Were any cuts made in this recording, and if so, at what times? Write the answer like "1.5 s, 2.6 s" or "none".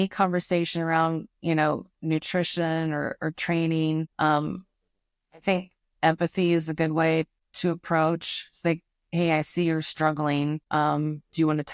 4.1 s, 7.4 s, 10.6 s